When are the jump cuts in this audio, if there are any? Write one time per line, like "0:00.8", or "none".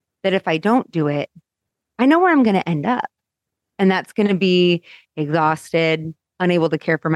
0:06.2